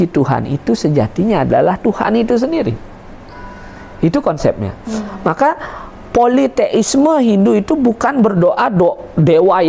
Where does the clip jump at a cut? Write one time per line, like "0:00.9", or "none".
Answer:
none